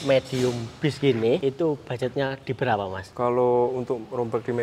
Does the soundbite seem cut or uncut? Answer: cut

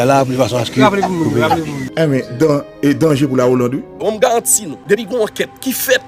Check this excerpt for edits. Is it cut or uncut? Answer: cut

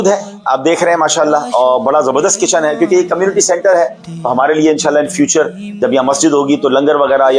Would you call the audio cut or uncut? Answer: uncut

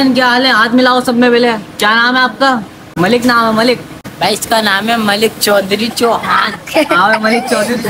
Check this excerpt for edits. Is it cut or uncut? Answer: cut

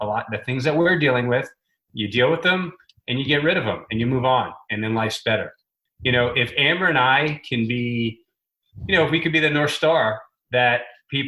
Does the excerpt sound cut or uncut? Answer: cut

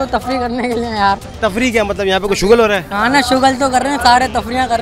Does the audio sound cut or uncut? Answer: uncut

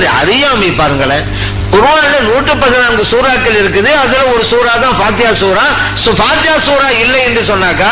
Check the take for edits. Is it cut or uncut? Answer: uncut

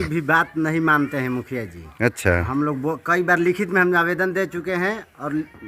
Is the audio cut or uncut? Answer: uncut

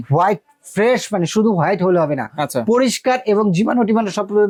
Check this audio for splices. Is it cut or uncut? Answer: uncut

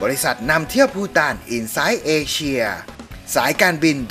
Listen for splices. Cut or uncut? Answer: cut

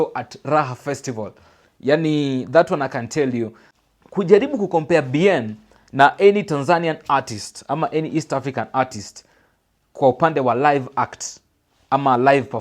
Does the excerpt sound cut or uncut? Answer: cut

